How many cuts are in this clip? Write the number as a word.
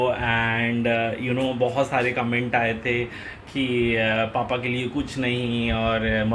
zero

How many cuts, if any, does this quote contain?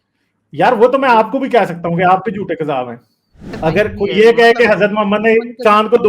one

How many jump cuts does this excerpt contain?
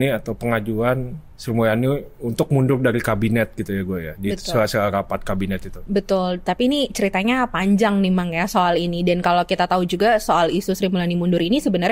zero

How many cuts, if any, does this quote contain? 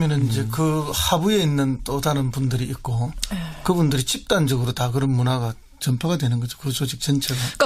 one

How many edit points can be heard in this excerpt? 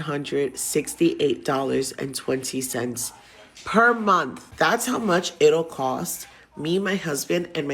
one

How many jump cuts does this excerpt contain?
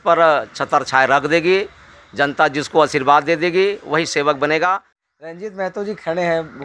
one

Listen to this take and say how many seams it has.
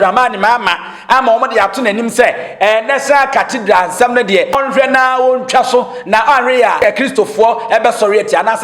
two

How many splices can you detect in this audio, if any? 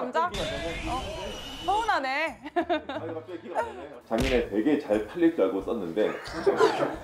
one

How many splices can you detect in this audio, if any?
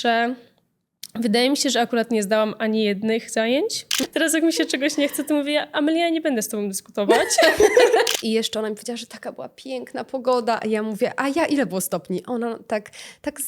two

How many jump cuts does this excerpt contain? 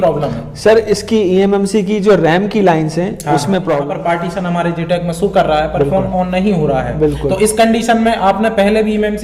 one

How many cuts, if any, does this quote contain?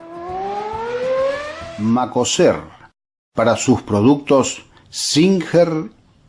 one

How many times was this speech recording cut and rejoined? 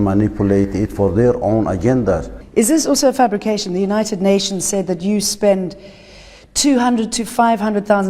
one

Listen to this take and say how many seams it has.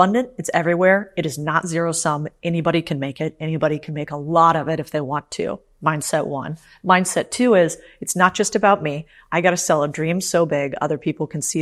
zero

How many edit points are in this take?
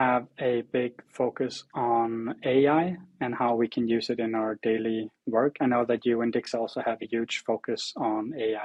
zero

